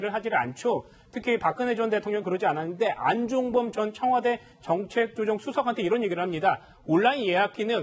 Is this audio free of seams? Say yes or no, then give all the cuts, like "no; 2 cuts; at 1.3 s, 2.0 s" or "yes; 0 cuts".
yes; 0 cuts